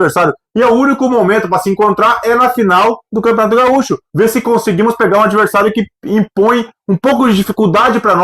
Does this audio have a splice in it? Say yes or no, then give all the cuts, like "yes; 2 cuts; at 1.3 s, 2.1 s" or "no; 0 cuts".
yes; 1 cut; at 4.0 s